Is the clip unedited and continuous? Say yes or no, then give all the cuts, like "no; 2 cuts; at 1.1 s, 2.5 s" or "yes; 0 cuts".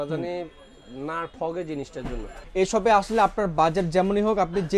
no; 1 cut; at 2.3 s